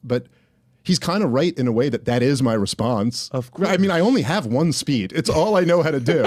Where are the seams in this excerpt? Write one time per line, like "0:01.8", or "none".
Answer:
none